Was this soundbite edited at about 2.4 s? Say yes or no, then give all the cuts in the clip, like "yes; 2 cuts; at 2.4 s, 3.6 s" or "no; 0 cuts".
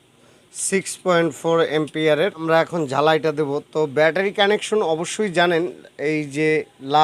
yes; 1 cut; at 2.4 s